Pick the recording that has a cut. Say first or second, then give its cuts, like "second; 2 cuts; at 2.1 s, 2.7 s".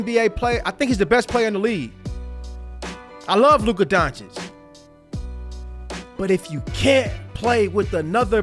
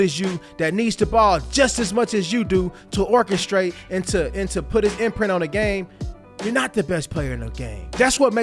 first; 2 cuts; at 4.2 s, 6.1 s